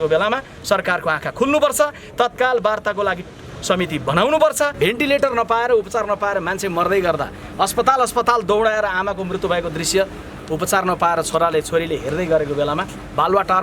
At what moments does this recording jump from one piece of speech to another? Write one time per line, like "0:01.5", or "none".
0:04.7